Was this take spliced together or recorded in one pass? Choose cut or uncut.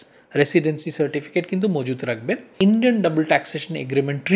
cut